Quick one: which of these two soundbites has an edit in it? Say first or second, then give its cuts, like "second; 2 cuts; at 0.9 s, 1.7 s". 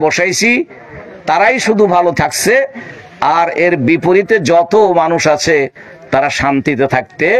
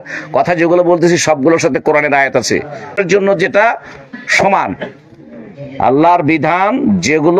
second; 1 cut; at 3.0 s